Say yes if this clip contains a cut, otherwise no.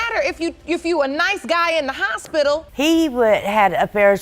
yes